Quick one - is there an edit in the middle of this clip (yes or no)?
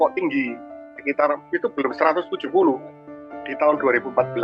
yes